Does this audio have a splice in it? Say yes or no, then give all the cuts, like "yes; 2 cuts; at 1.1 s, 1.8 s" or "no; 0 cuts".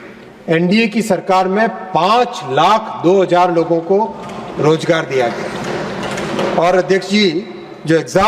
no; 0 cuts